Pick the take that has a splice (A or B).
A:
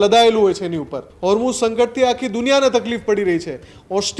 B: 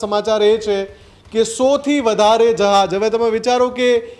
A